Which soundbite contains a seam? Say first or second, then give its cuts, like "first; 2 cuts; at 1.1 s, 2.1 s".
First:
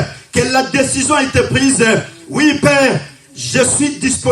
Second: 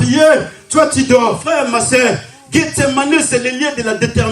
second; 1 cut; at 1.4 s